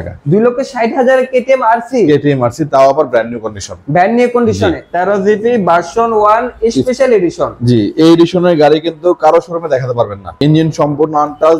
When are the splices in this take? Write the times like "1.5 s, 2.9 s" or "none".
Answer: 4.9 s, 10.2 s